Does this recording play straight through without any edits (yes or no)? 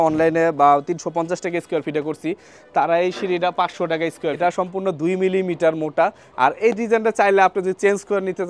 no